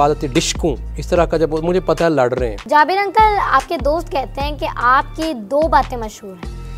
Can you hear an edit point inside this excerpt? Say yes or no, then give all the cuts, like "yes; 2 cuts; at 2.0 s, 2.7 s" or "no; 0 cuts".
yes; 2 cuts; at 0.9 s, 2.6 s